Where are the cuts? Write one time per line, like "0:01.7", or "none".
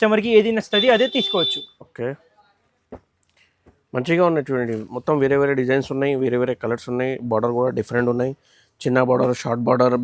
none